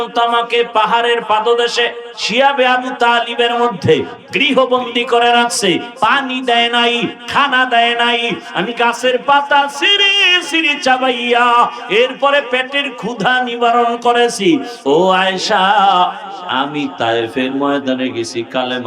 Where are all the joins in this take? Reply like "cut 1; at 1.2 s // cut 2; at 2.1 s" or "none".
cut 1; at 14.7 s